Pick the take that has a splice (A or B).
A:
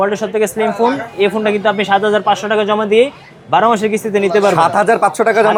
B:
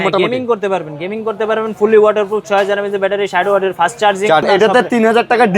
B